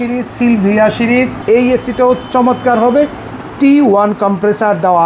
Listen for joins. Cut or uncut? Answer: cut